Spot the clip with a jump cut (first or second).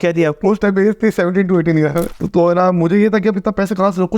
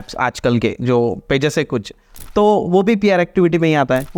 first